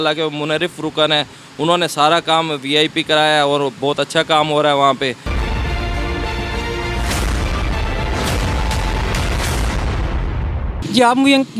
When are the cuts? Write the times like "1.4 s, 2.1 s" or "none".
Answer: none